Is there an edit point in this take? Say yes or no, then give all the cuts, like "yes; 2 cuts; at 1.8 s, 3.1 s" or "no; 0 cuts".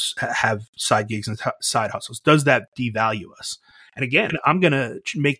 yes; 1 cut; at 4.3 s